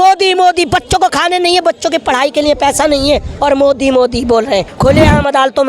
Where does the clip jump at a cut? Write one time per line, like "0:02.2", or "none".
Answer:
0:04.7